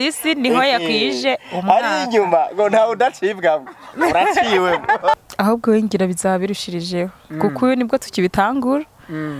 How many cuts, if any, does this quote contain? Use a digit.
1